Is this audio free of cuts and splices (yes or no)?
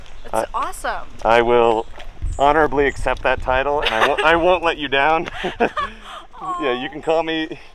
yes